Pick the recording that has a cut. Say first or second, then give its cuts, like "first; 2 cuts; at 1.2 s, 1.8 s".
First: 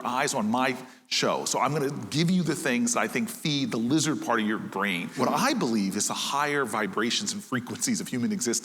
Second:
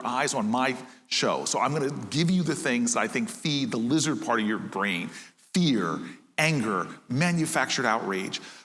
first; 1 cut; at 5.2 s